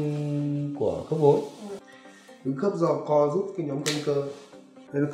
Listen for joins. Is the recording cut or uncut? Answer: uncut